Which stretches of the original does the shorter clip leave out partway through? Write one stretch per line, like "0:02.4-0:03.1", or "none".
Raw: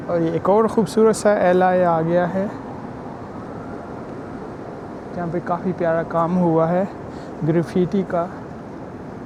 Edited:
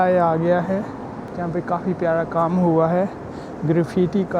0:02.9-0:05.0